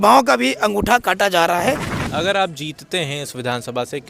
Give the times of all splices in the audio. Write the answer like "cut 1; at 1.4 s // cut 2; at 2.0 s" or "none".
cut 1; at 1.9 s